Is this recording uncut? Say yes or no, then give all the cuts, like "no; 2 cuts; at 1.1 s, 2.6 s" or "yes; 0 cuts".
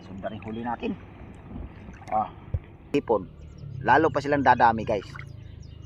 no; 1 cut; at 2.9 s